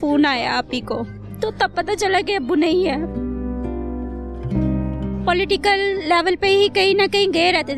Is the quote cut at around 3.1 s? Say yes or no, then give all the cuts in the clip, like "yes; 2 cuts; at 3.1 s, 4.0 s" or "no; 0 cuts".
yes; 3 cuts; at 1.2 s, 3.1 s, 5.0 s